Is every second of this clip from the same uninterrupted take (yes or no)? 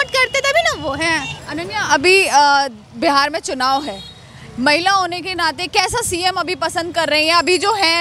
yes